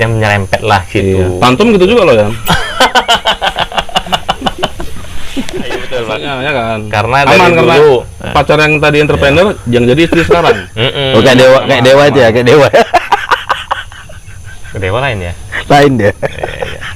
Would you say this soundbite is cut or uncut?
cut